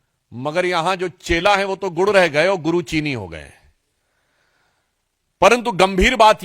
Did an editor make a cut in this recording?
no; 0 cuts

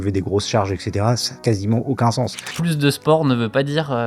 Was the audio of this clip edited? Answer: yes; 2 cuts; at 1.3 s, 2.5 s

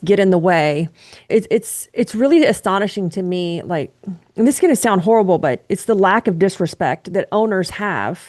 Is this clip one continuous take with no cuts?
yes; 0 cuts

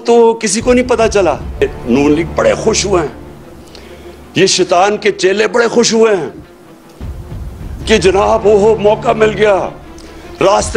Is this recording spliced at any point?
yes; 1 cut; at 1.6 s

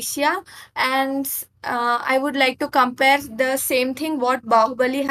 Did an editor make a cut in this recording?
no; 0 cuts

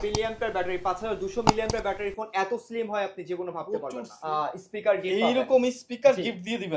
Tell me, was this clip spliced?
yes; 1 cut; at 4.1 s

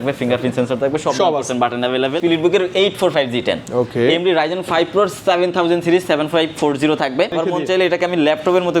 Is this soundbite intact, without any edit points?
no; 2 cuts; at 2.2 s, 7.4 s

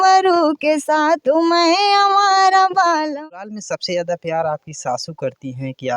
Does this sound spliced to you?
yes; 1 cut; at 3.2 s

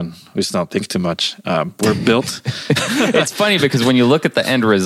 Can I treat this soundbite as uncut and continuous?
yes; 0 cuts

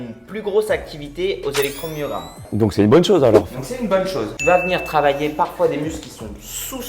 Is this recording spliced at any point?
yes; 2 cuts; at 2.4 s, 4.3 s

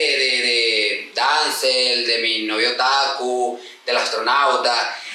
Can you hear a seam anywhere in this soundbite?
no; 0 cuts

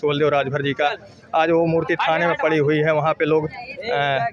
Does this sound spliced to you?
no; 0 cuts

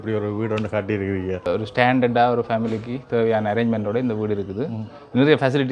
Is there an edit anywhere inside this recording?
yes; 1 cut; at 1.5 s

